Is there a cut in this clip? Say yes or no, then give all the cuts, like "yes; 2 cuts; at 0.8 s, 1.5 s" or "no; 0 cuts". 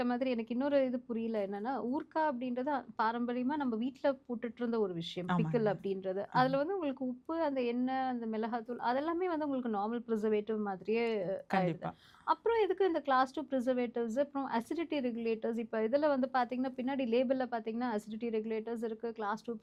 no; 0 cuts